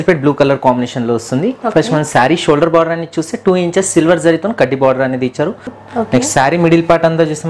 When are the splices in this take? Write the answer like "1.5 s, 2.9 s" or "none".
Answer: 5.7 s